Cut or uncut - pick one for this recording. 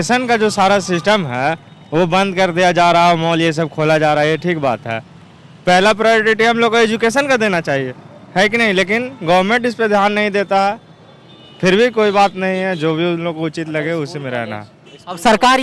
uncut